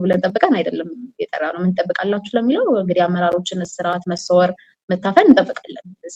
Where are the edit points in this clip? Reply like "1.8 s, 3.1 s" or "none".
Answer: none